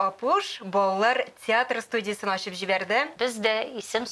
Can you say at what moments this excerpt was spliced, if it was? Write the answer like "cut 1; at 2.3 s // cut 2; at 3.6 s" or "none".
cut 1; at 3.1 s